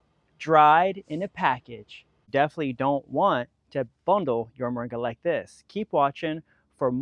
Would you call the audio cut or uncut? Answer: cut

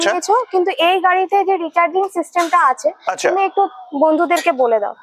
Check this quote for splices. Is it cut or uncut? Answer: uncut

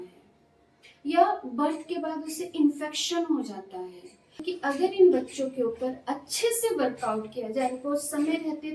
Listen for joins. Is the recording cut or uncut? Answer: cut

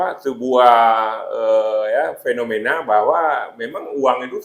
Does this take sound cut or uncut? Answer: uncut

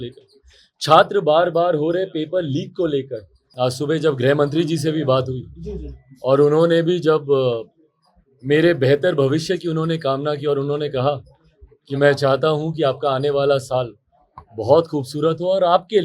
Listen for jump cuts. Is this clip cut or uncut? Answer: cut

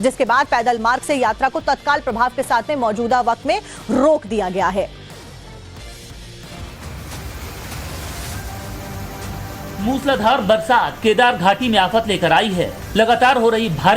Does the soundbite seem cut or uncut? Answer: uncut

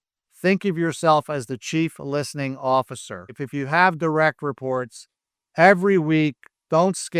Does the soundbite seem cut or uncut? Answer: cut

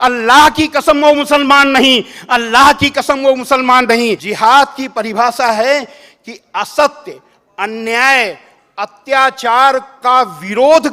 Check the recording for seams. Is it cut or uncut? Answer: cut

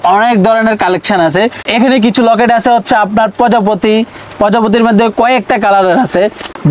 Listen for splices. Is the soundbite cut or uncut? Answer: uncut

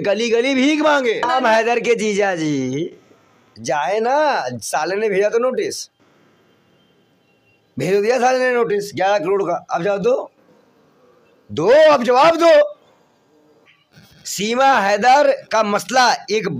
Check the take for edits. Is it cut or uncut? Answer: cut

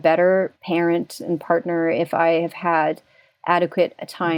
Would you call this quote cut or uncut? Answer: uncut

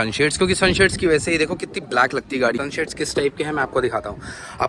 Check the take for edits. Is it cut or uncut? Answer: cut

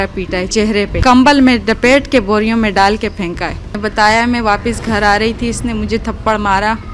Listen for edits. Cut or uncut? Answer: cut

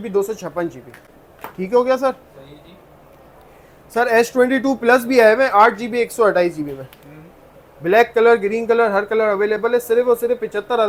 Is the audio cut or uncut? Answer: uncut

